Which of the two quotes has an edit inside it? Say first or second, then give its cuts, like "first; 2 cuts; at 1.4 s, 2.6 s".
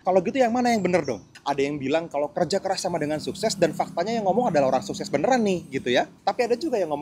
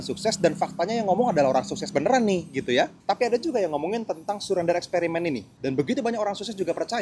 first; 1 cut; at 1.3 s